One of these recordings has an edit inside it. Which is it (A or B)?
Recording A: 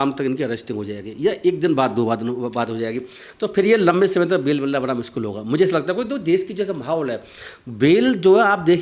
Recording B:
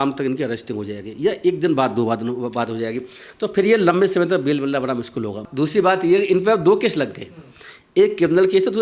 B